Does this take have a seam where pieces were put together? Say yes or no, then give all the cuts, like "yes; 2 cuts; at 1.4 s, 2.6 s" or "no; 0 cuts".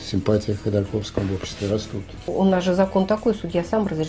yes; 1 cut; at 2.3 s